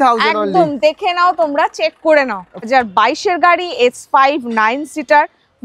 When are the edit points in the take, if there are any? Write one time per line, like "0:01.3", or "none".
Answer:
0:02.7